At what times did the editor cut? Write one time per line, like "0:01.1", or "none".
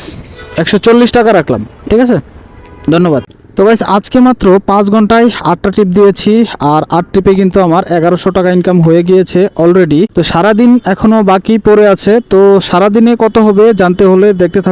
0:03.4
0:10.1